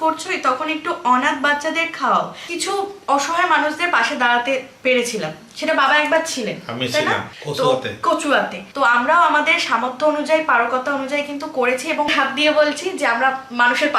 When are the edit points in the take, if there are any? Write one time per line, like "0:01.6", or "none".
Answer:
0:02.5
0:07.4
0:08.6
0:12.1